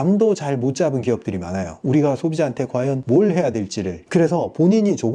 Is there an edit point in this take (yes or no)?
yes